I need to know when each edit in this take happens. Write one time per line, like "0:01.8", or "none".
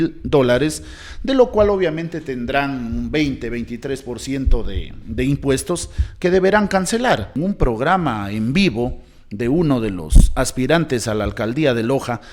0:07.3